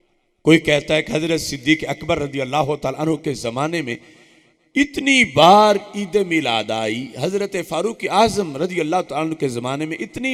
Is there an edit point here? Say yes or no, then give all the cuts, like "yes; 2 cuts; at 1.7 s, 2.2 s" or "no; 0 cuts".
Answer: no; 0 cuts